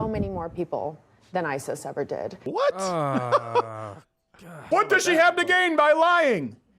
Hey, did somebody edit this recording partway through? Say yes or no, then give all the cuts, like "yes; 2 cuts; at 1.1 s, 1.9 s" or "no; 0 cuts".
yes; 2 cuts; at 2.4 s, 4.7 s